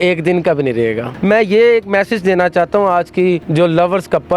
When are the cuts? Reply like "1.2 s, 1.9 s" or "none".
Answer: 1.1 s, 3.5 s